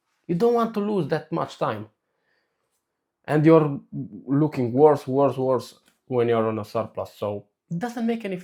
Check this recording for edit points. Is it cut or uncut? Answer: uncut